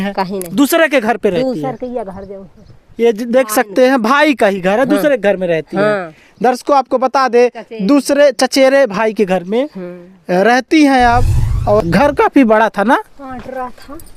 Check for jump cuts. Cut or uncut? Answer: cut